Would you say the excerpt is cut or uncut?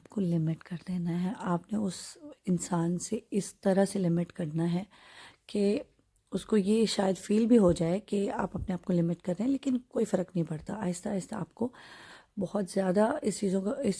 uncut